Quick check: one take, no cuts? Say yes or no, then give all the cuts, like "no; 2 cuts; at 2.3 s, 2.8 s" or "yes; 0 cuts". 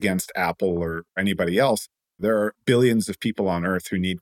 no; 1 cut; at 2.4 s